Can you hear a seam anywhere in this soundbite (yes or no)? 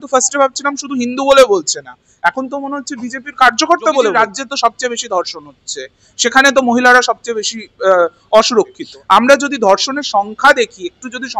yes